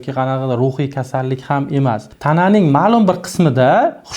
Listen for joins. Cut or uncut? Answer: cut